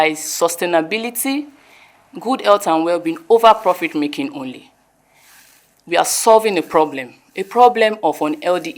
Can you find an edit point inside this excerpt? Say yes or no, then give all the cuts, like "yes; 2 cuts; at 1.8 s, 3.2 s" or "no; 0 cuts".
no; 0 cuts